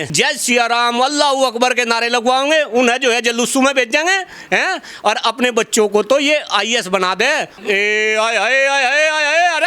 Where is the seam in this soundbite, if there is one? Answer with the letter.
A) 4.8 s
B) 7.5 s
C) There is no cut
B